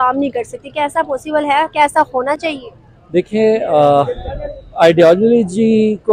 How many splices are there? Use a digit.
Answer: 0